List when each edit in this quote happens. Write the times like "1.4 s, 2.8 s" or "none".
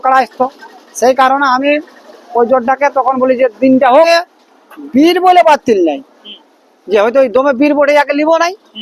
4.1 s